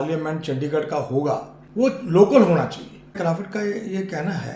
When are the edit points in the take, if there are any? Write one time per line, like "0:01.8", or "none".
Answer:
0:01.6
0:03.2